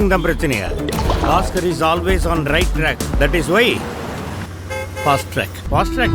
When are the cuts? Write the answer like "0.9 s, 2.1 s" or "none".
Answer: none